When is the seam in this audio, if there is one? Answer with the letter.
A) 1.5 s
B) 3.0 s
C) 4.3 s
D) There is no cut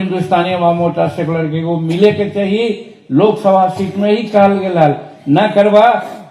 D